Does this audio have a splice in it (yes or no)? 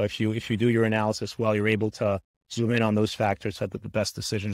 no